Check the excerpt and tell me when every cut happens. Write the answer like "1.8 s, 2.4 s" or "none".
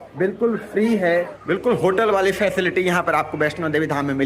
1.4 s